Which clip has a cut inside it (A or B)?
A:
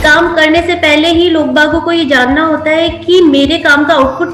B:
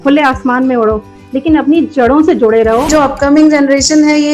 B